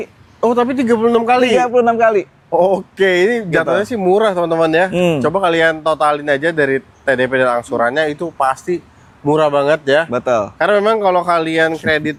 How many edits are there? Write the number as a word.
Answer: zero